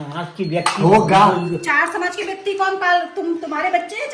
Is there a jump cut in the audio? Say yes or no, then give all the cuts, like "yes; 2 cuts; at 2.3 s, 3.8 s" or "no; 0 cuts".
no; 0 cuts